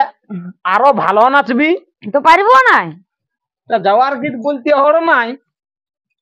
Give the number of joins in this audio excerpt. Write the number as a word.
one